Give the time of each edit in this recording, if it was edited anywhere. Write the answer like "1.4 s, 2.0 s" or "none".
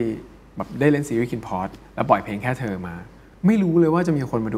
none